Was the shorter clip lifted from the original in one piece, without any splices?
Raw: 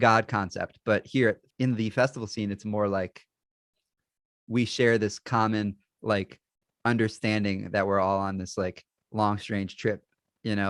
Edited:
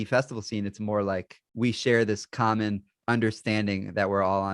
no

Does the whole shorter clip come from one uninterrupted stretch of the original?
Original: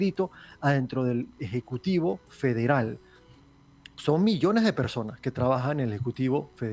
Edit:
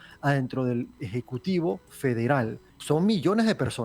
no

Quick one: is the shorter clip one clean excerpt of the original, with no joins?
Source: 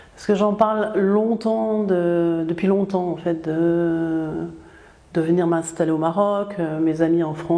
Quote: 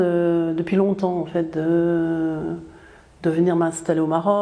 yes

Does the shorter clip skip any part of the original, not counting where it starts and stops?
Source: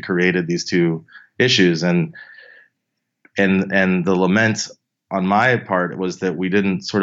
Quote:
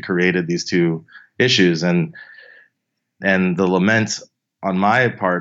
yes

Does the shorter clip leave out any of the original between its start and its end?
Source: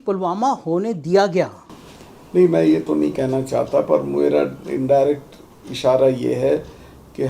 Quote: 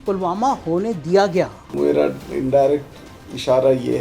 yes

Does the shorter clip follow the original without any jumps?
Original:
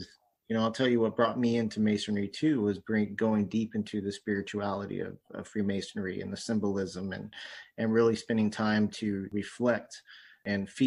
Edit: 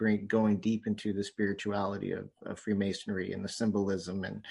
yes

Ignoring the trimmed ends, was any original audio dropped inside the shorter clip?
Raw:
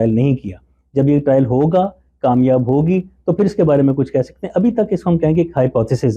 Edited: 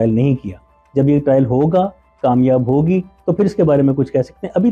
no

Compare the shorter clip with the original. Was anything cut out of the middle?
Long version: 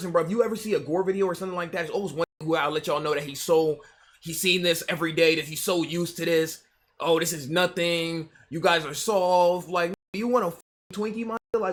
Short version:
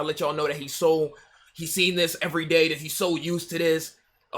no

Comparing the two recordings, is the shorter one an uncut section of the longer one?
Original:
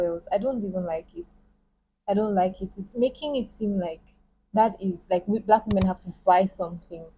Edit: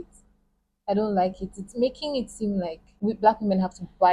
no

